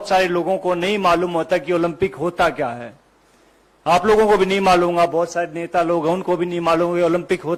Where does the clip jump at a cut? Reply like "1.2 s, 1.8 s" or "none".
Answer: none